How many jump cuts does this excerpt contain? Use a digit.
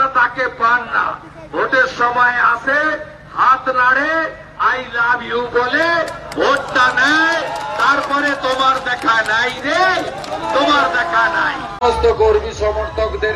1